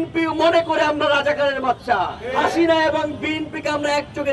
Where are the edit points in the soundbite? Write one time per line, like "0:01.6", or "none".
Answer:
0:02.2